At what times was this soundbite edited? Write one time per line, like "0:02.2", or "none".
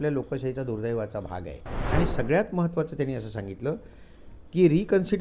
0:01.9